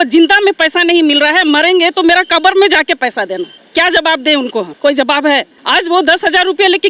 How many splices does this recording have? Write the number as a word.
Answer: three